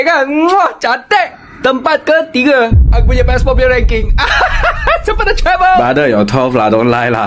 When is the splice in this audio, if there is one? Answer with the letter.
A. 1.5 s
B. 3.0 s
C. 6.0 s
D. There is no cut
D